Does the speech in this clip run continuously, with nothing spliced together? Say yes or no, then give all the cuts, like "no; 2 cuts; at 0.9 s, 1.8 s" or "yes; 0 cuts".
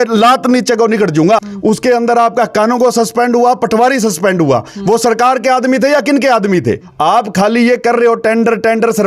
no; 2 cuts; at 1.5 s, 6.9 s